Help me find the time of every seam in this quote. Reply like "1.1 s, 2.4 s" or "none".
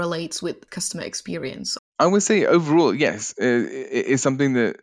1.8 s